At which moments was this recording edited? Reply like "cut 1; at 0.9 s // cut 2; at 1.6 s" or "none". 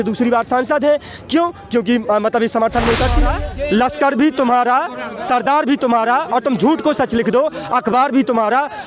cut 1; at 3.3 s

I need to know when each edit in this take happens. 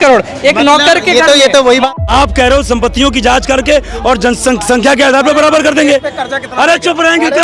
cut 1; at 1.9 s

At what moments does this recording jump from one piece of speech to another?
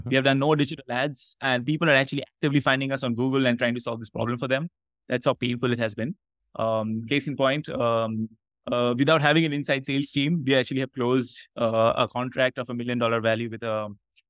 none

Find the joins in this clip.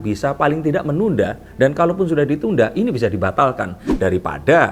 none

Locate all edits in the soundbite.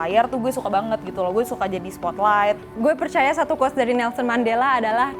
cut 1; at 2.7 s

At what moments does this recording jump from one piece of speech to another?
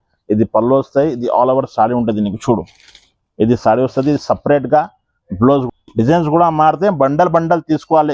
cut 1; at 5.7 s

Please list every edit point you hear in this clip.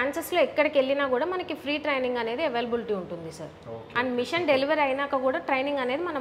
none

